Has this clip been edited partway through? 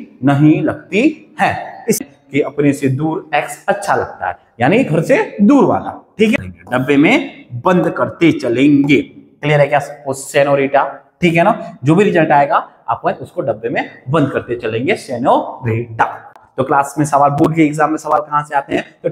yes; 3 cuts; at 2.0 s, 6.3 s, 16.4 s

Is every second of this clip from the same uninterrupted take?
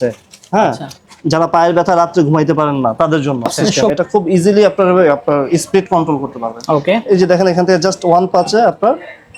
no; 1 cut; at 3.7 s

